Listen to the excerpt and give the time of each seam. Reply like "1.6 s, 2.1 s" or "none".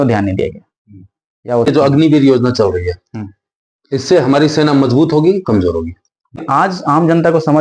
1.7 s, 6.4 s